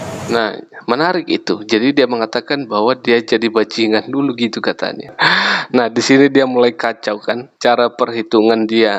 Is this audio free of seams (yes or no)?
no